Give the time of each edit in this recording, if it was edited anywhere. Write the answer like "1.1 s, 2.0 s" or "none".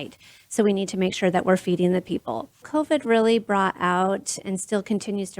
2.7 s

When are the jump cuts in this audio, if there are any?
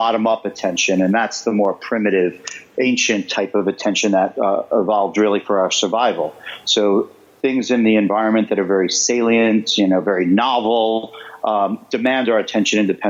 none

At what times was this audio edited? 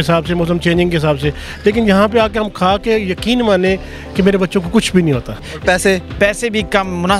5.5 s

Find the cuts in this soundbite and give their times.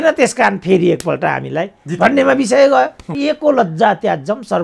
3.1 s

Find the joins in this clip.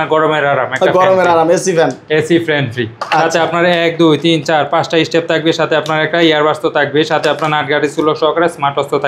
none

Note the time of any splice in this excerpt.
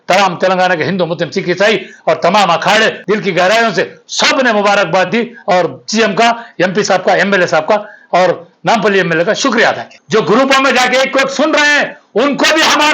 3.0 s, 9.9 s

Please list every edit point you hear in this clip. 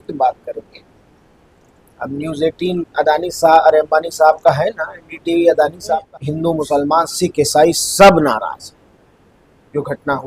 6.1 s

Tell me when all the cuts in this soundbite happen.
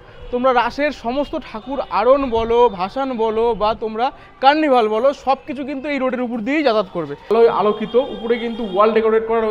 7.3 s

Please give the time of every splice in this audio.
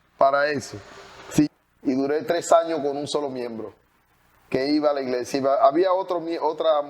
1.5 s

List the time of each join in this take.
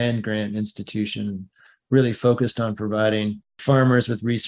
3.5 s

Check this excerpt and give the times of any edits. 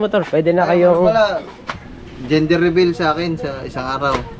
none

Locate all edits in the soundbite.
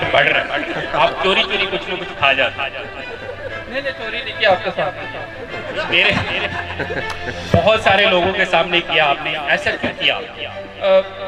none

